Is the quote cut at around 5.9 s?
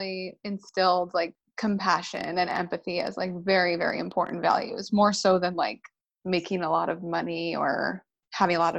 no; 1 cut; at 1.4 s

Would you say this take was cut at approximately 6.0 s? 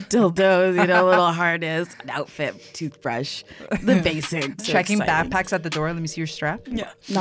no; 1 cut; at 4.6 s

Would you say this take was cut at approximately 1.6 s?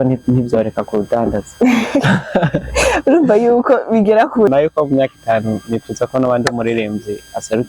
no; 1 cut; at 4.5 s

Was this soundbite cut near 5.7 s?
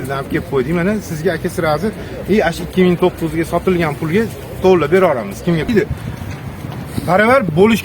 yes; 1 cut; at 5.7 s

